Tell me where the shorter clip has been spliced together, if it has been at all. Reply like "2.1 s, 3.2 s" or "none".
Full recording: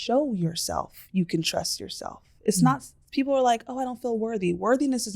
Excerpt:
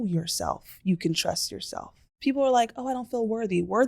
2.0 s